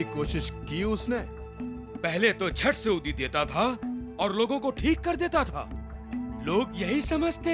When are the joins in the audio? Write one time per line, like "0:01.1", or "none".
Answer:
none